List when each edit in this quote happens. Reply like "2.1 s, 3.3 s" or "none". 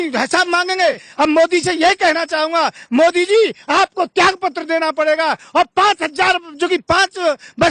1.1 s